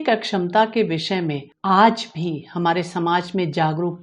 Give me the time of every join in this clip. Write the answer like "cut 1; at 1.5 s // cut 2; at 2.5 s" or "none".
cut 1; at 1.5 s